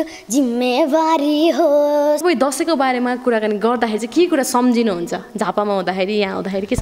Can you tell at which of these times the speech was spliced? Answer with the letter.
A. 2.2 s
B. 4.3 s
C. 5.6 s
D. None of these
A